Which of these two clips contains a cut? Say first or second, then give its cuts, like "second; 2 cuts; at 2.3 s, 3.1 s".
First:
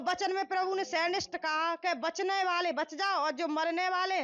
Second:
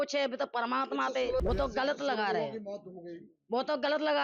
second; 1 cut; at 1.4 s